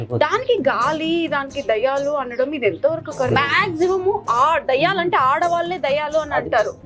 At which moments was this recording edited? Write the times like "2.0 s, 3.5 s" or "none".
3.3 s